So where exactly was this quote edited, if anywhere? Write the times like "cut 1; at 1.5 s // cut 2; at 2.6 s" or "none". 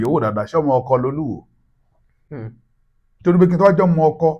none